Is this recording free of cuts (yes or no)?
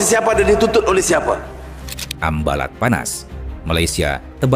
yes